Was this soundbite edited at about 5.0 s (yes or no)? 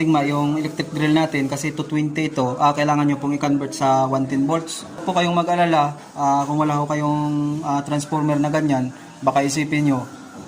yes